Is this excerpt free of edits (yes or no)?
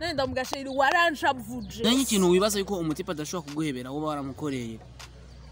no